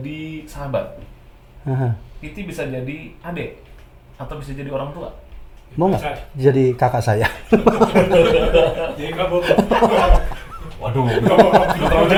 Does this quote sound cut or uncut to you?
uncut